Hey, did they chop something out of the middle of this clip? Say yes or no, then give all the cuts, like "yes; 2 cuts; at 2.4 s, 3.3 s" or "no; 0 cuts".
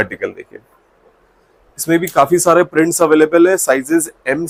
no; 0 cuts